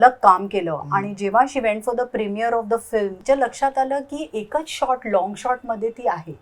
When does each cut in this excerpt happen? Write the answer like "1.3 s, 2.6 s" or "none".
3.2 s